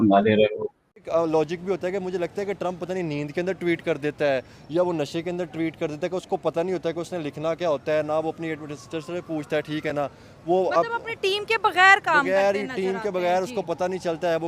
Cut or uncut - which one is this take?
cut